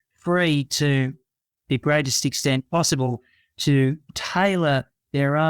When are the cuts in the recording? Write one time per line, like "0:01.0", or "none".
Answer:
0:04.1